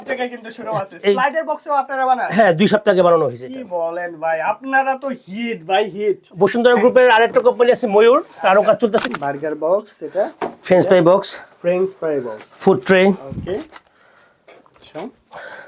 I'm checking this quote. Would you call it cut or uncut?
cut